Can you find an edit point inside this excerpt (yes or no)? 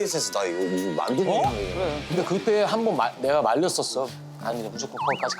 yes